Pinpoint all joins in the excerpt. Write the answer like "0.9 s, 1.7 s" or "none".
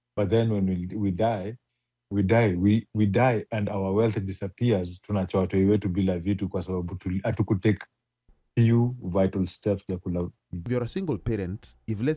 10.6 s